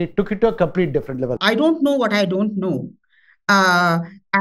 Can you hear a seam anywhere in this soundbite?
yes; 1 cut; at 1.4 s

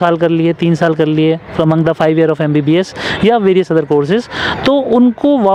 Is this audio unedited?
yes; 0 cuts

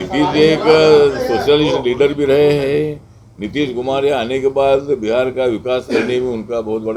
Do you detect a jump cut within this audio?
no; 0 cuts

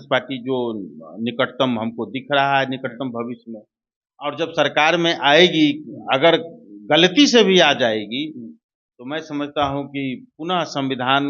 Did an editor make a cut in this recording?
no; 0 cuts

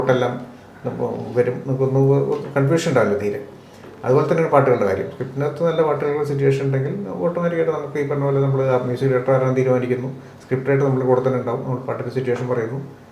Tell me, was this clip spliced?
no; 0 cuts

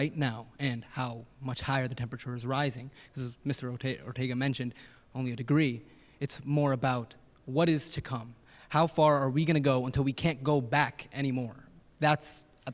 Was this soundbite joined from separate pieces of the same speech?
no; 0 cuts

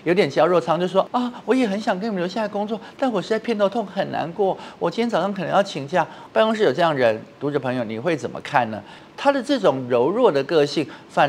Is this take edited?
yes; 3 cuts; at 1.1 s, 6.2 s, 8.9 s

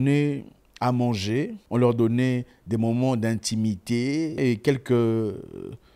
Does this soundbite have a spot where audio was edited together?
yes; 2 cuts; at 1.6 s, 4.4 s

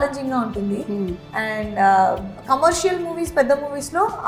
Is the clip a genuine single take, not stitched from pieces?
yes; 0 cuts

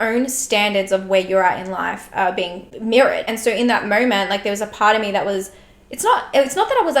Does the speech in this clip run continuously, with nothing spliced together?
no; 2 cuts; at 2.7 s, 3.3 s

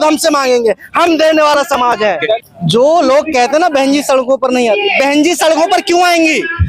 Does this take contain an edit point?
yes; 1 cut; at 2.4 s

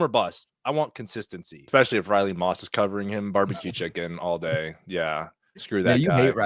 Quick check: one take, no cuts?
no; 1 cut; at 1.6 s

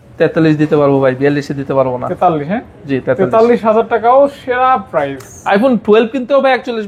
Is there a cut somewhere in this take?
no; 0 cuts

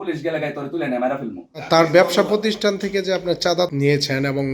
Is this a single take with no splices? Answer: no; 2 cuts; at 1.6 s, 3.7 s

